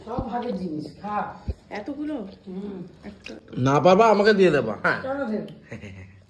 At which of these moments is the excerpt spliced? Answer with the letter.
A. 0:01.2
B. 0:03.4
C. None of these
C